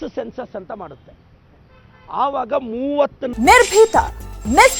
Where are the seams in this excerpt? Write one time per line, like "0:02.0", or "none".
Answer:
0:03.3